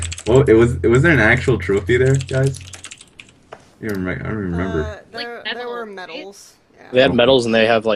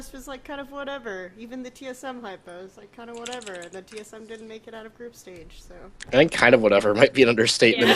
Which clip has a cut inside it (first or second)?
second